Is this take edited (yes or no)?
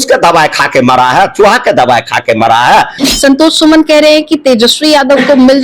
yes